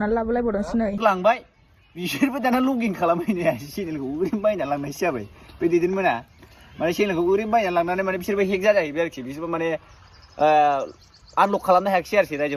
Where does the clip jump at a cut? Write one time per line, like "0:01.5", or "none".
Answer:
0:01.0

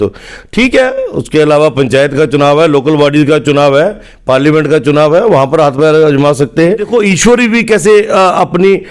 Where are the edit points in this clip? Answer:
0:06.8

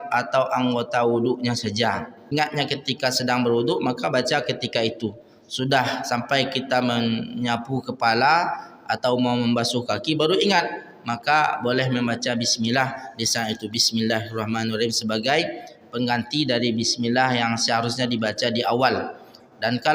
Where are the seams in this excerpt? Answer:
0:02.2

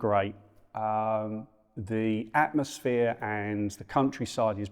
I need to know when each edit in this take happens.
none

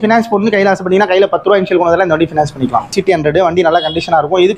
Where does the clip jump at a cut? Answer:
0:02.9

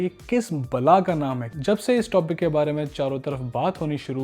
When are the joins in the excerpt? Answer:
0:01.5

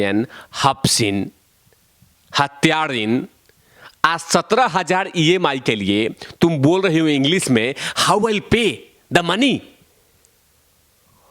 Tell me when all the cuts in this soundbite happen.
none

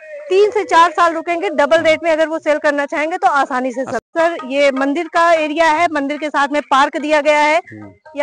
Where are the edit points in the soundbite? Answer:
0:04.1

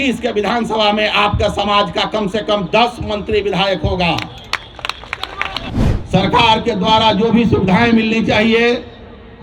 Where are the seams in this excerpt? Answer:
0:05.7

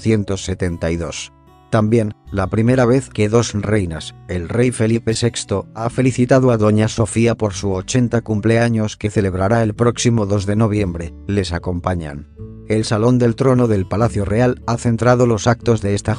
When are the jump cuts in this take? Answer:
0:12.2

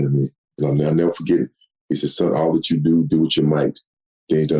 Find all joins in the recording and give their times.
none

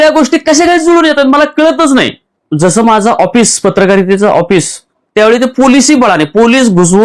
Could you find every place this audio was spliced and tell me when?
0:02.3

